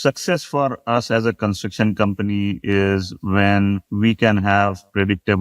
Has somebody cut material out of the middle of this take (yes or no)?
yes